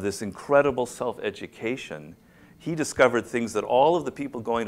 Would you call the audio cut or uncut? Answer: uncut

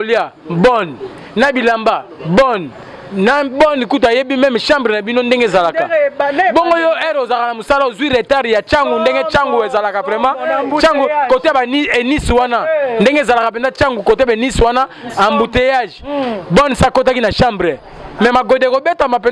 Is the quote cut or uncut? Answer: uncut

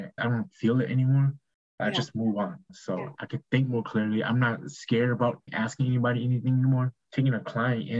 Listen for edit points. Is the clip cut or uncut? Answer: cut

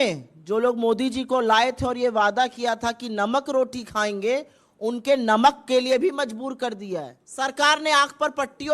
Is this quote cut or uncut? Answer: cut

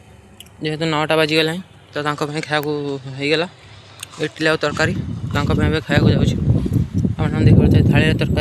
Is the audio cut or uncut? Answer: uncut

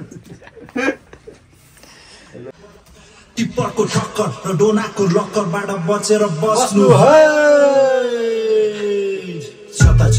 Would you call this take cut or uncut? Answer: cut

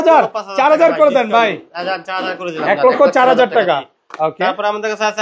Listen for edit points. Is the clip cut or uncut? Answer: uncut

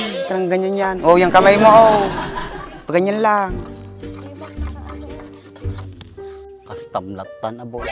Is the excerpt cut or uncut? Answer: cut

